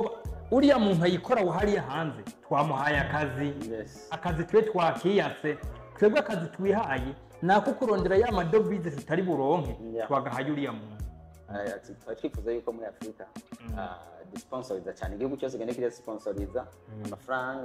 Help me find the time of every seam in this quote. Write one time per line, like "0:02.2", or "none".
0:11.4

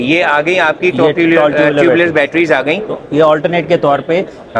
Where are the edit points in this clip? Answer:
none

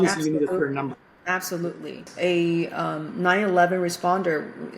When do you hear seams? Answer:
0:02.0

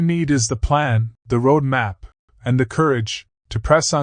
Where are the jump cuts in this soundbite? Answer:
0:01.1

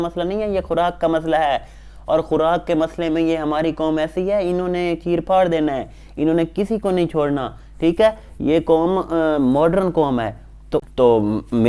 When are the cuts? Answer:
0:10.6

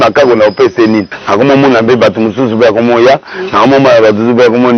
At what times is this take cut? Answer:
0:01.2

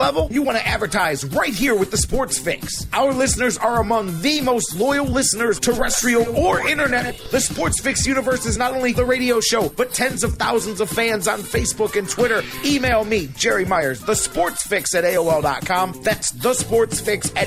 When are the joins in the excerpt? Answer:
none

